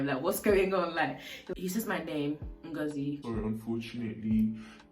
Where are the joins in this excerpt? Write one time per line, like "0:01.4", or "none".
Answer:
0:01.3
0:03.2